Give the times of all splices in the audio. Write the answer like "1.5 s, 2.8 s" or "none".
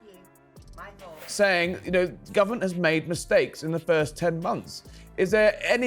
1.3 s